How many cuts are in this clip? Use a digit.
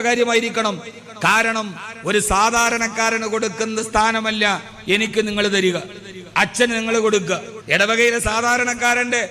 1